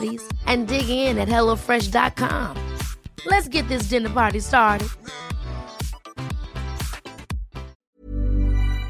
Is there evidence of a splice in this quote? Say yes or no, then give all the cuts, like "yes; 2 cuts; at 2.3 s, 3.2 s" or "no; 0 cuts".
yes; 1 cut; at 7.7 s